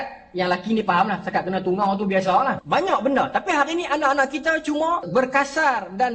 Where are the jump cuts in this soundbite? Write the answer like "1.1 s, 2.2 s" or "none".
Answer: 2.6 s, 5.1 s

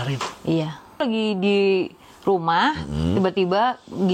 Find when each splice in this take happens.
1.0 s

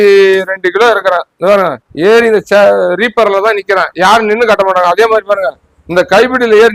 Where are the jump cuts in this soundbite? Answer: none

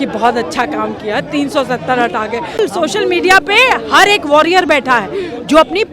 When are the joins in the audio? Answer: 2.6 s

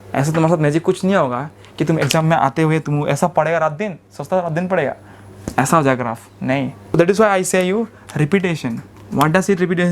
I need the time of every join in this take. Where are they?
7.0 s

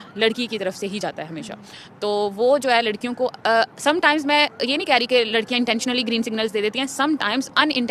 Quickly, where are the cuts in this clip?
none

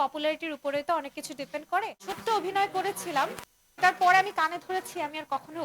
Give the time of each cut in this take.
2.1 s

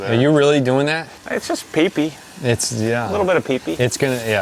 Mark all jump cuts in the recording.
1.1 s

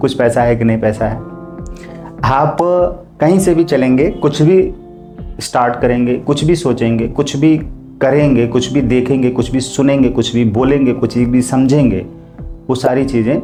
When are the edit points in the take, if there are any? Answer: none

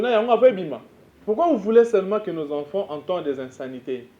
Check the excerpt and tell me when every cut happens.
1.2 s

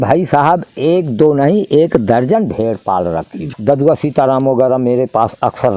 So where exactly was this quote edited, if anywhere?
3.4 s

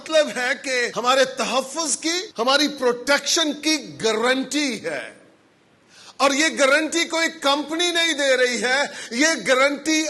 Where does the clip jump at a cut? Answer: 0.9 s, 2.3 s

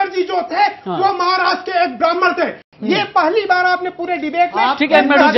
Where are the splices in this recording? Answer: 2.7 s

